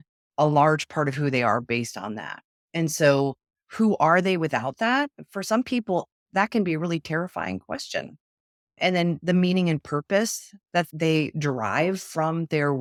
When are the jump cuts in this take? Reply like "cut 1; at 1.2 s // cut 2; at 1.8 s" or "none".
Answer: none

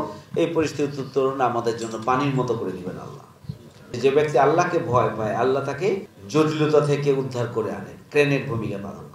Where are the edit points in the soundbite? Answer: cut 1; at 4.0 s // cut 2; at 6.1 s

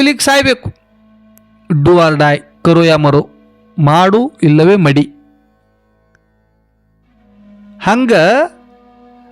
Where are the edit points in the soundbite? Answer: none

